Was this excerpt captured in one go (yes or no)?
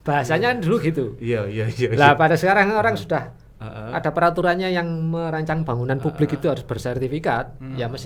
yes